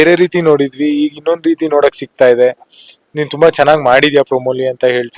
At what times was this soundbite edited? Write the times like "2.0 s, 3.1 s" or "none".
none